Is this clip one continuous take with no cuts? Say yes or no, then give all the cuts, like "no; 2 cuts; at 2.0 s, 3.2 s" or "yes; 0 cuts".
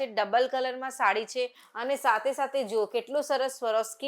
no; 1 cut; at 1.6 s